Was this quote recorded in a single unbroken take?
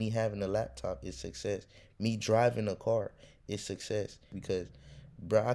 no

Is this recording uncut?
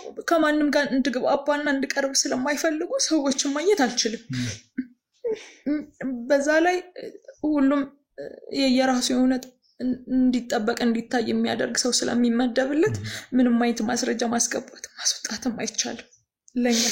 yes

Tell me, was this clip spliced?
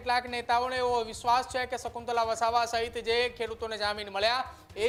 no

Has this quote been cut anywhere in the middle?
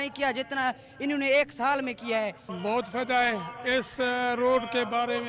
yes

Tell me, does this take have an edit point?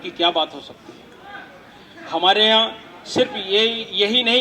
no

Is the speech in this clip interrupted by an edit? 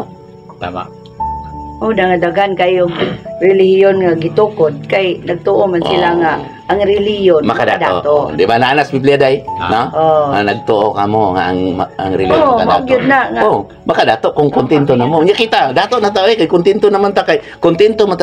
no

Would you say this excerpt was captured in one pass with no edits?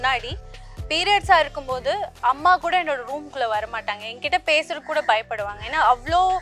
yes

